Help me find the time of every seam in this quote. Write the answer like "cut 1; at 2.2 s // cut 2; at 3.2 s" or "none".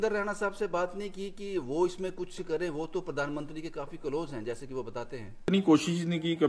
cut 1; at 5.4 s